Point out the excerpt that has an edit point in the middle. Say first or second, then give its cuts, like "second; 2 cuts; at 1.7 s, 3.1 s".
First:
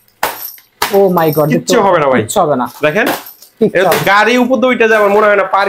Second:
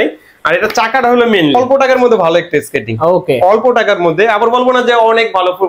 second; 1 cut; at 1.5 s